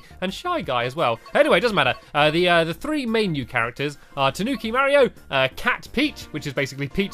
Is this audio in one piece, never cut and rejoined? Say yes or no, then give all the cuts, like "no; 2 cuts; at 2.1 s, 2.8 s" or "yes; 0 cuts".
no; 1 cut; at 5.5 s